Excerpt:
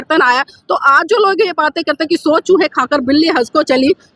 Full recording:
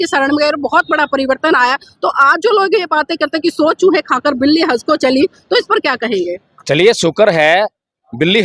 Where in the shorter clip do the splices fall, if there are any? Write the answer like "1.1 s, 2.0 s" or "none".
none